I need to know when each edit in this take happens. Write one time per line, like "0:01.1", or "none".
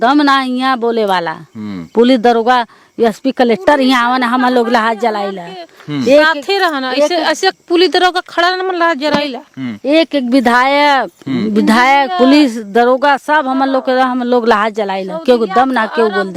none